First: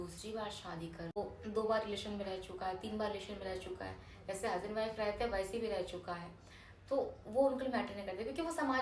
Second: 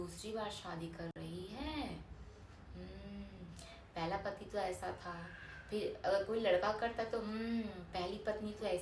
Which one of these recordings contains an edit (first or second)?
first